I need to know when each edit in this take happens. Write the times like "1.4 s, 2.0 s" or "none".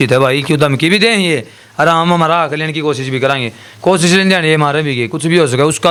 none